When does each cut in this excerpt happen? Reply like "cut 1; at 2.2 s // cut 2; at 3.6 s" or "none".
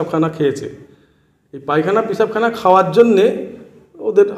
none